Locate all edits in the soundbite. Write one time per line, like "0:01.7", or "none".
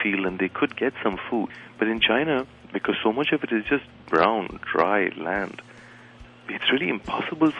0:01.6